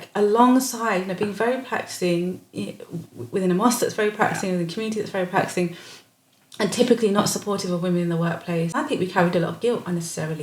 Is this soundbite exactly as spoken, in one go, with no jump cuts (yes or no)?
no